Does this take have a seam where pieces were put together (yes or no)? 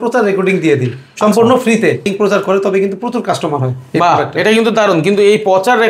no